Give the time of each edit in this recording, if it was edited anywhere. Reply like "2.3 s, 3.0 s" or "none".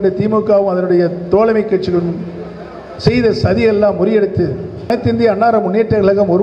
4.9 s